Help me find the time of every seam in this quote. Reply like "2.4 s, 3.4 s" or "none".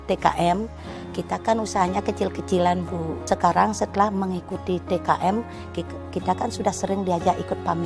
3.2 s